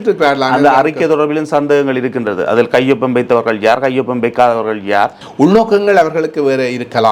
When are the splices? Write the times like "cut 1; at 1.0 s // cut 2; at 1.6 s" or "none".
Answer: cut 1; at 5.2 s